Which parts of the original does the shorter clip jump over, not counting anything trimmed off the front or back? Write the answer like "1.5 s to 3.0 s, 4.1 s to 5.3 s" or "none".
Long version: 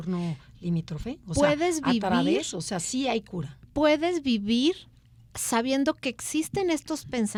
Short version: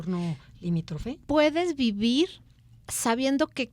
1.1 s to 3.6 s